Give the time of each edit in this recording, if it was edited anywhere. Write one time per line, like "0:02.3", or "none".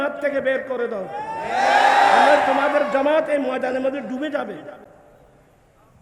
none